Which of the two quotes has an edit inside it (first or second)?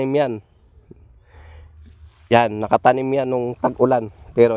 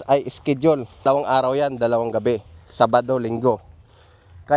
second